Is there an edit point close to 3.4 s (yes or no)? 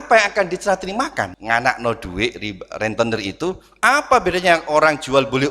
no